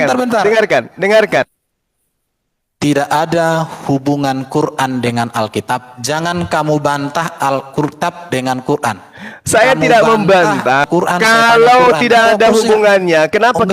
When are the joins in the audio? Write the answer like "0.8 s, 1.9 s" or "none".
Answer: 10.8 s